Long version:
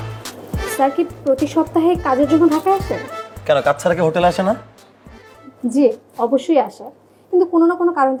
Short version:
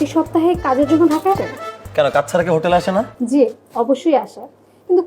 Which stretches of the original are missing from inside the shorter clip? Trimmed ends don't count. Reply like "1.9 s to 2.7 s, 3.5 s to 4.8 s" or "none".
2.8 s to 2.9 s, 4.6 s to 5.6 s